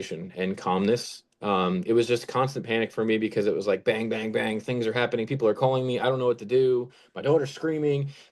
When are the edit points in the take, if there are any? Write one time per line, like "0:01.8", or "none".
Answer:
none